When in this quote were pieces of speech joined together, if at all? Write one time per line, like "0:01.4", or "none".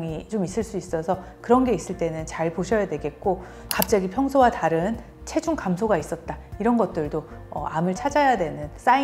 0:03.7